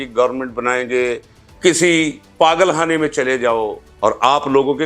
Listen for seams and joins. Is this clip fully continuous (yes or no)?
no